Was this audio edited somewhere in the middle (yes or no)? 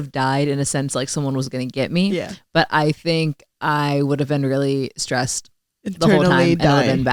no